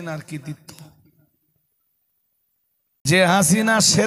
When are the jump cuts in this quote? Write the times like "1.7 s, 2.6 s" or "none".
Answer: 3.1 s